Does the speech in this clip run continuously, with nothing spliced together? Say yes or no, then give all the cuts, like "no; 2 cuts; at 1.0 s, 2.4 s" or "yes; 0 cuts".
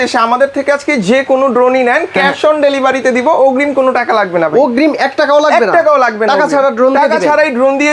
yes; 0 cuts